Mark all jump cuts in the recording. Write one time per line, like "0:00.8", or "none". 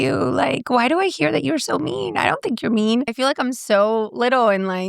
0:03.1